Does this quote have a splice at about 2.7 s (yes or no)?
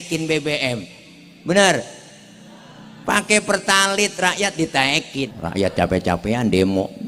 no